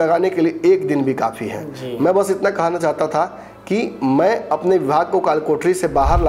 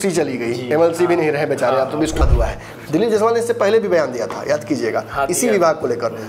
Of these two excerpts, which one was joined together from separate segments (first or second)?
second